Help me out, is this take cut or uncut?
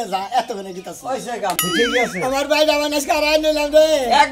cut